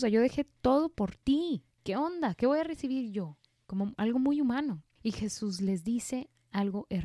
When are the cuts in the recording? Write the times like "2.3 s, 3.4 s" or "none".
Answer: 1.7 s, 4.9 s